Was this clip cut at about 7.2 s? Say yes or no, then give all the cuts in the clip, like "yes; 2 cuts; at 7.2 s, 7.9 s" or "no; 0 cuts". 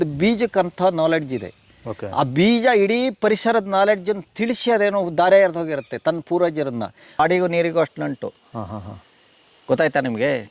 yes; 1 cut; at 7.2 s